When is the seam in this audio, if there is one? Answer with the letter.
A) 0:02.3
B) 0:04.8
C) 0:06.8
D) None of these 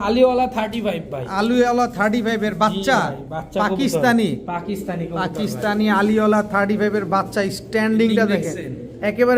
D